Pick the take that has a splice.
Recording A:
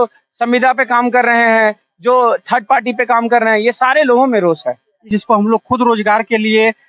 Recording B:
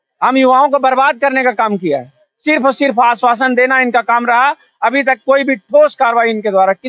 A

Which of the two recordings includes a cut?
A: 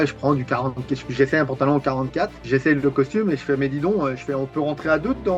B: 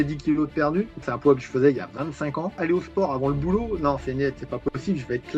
B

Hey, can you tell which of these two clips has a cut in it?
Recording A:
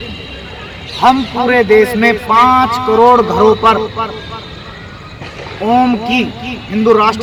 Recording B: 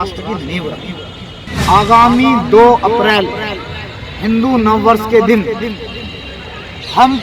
B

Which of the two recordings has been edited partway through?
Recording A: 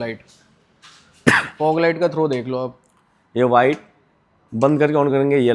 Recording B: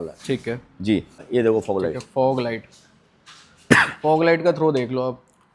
B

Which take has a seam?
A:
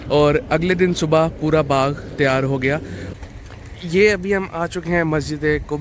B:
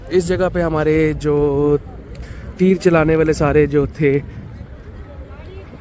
A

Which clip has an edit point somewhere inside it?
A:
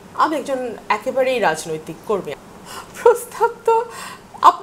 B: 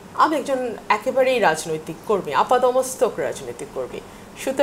A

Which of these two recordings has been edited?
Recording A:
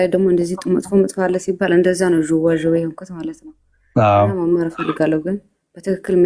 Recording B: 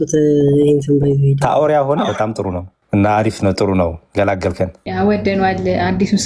B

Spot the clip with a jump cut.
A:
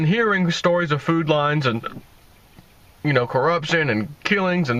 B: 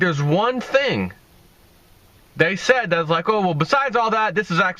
B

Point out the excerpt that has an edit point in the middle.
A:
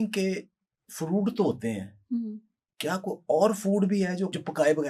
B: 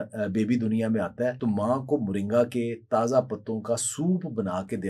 B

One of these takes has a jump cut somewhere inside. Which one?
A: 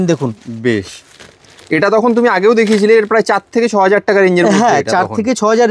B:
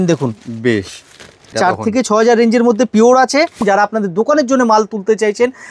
B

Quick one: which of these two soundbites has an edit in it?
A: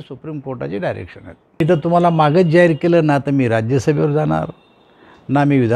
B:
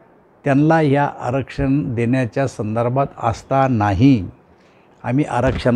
A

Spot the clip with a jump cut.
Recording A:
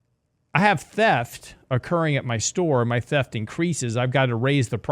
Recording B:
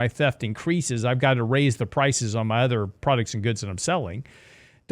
B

